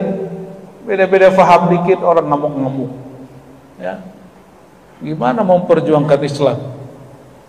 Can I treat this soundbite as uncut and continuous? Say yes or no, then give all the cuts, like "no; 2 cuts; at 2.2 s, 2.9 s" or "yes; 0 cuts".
yes; 0 cuts